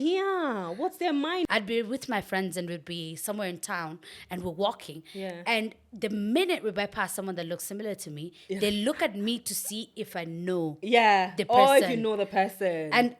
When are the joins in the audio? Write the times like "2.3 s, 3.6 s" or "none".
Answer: 1.5 s